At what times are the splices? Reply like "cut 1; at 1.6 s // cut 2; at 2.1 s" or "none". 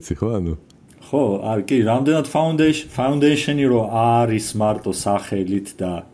none